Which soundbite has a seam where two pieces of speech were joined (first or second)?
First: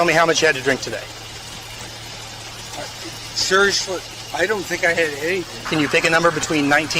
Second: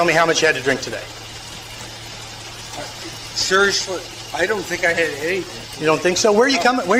first